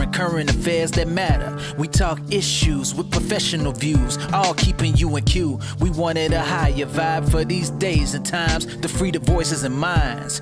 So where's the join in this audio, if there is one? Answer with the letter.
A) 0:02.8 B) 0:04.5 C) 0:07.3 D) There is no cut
D